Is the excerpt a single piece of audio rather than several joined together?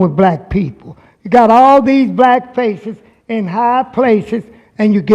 yes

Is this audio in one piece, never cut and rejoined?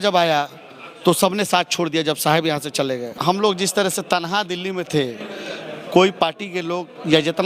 no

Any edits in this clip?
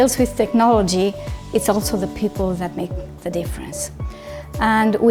no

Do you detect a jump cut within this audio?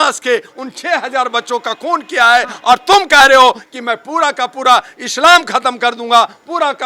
no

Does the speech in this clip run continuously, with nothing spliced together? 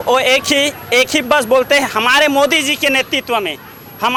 yes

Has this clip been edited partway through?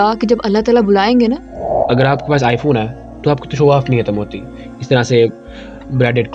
yes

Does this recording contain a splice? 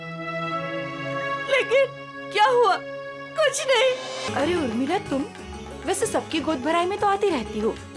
yes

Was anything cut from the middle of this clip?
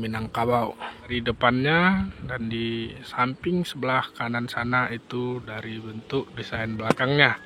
yes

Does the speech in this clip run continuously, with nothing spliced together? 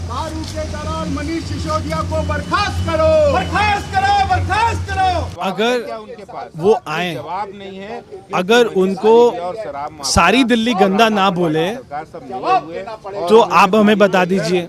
no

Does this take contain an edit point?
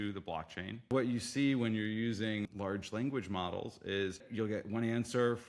yes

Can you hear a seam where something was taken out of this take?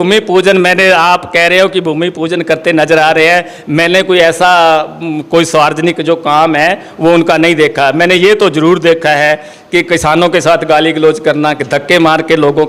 no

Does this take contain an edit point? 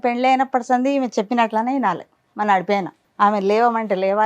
yes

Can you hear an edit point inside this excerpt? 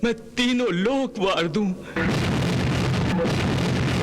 yes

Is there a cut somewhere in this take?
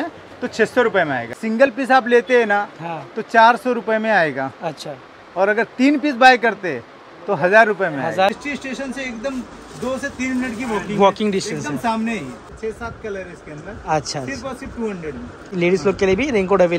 yes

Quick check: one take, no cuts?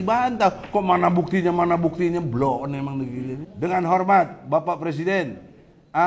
no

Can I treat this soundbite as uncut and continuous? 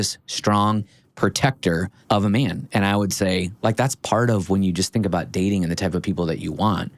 yes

